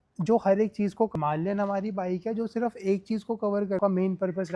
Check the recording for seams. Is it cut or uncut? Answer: cut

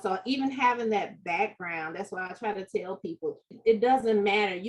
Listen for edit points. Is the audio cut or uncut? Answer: cut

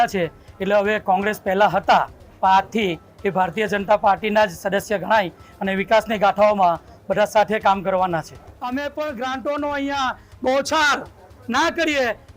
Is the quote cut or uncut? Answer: uncut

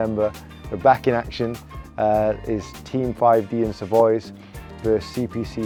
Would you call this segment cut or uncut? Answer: uncut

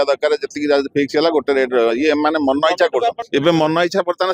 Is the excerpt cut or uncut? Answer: cut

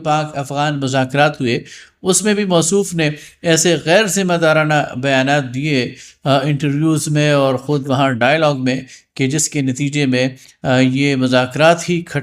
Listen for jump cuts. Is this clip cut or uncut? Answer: uncut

